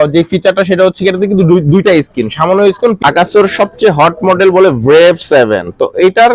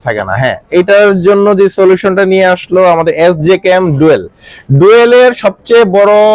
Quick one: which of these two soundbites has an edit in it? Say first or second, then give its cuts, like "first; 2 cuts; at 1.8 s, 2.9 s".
first; 1 cut; at 3.0 s